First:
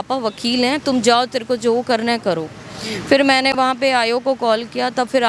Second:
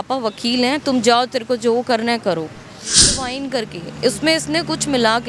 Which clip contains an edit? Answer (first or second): second